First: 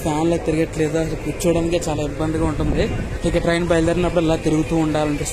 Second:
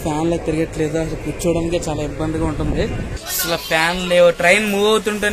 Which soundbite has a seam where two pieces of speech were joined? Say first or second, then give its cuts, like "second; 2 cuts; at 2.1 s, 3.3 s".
second; 1 cut; at 3.1 s